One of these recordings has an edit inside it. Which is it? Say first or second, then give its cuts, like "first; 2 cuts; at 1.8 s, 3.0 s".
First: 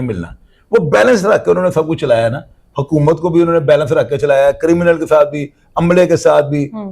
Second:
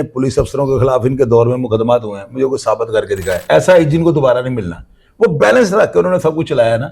second; 1 cut; at 3.4 s